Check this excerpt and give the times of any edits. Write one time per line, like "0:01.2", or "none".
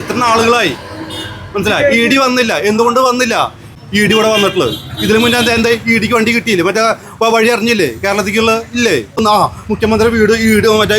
0:03.7
0:09.2